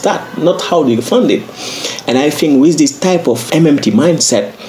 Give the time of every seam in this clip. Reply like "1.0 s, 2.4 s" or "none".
3.5 s